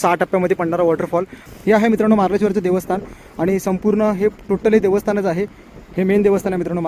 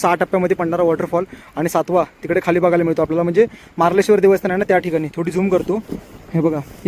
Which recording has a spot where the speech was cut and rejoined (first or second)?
first